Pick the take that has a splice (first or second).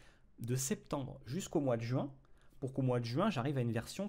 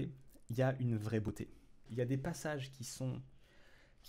second